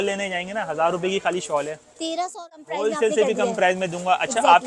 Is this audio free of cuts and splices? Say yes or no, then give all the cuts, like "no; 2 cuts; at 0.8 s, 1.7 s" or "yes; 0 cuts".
no; 1 cut; at 2.3 s